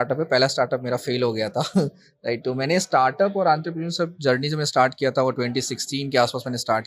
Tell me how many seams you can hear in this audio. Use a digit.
0